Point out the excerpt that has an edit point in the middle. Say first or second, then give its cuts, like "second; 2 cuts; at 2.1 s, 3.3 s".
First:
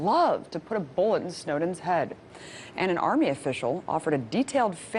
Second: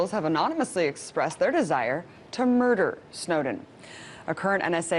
second; 1 cut; at 2.1 s